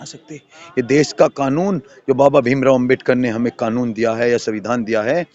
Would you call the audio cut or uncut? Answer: uncut